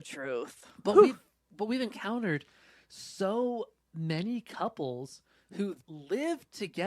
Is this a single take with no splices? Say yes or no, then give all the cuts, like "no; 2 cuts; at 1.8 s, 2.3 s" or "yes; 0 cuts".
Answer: no; 1 cut; at 5.8 s